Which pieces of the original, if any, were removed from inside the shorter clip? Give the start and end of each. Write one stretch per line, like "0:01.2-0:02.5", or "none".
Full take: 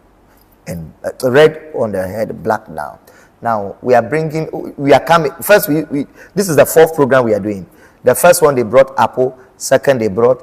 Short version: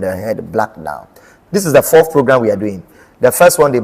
0:03.2-0:06.2